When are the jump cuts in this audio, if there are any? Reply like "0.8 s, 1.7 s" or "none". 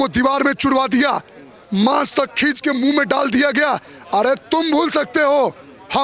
none